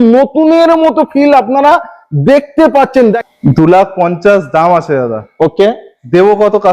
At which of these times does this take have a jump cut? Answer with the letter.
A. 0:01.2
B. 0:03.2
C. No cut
B